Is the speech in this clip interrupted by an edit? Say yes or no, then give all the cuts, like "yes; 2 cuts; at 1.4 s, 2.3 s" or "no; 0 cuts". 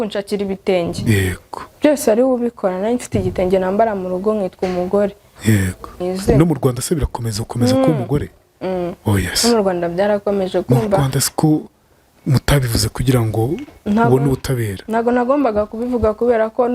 yes; 1 cut; at 6.0 s